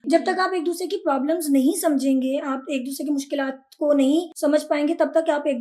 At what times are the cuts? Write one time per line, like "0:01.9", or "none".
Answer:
0:04.3